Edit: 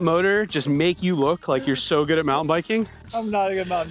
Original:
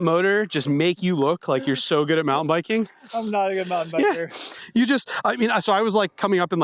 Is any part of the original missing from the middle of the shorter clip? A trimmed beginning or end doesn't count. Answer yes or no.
no